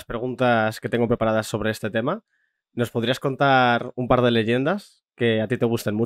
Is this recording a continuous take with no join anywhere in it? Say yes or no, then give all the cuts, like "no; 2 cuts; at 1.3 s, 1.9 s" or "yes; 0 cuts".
yes; 0 cuts